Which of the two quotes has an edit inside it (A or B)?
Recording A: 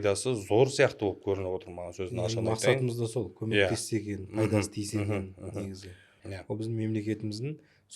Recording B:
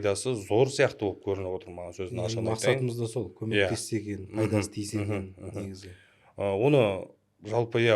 A